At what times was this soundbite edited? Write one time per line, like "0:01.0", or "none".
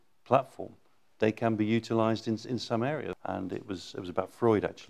0:03.1